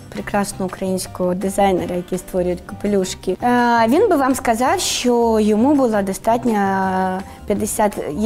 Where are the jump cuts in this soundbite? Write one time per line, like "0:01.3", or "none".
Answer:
0:03.4